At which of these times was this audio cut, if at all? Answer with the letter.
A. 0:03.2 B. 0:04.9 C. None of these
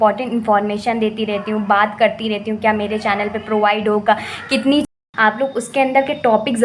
B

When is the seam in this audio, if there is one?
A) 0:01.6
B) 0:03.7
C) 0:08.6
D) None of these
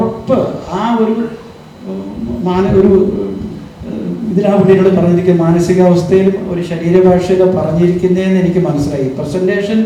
D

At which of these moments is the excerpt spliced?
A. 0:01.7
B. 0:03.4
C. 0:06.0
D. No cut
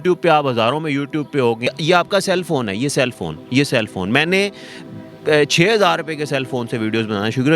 A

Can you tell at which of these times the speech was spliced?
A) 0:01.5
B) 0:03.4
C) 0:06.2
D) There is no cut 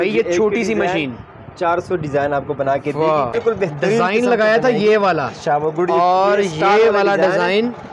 B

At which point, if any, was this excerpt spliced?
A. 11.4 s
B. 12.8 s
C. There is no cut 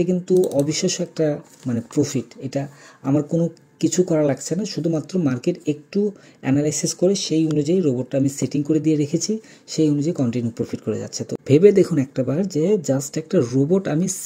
A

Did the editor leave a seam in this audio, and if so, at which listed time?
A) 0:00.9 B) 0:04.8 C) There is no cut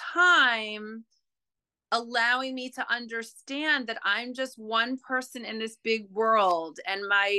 C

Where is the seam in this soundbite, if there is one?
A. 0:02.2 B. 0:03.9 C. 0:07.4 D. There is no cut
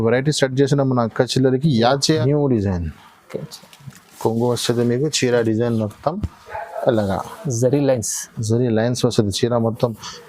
A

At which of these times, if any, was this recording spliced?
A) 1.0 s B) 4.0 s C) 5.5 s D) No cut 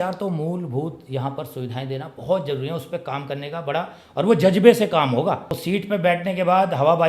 C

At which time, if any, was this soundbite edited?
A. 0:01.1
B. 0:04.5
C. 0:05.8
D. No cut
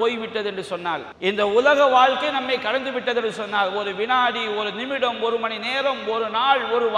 A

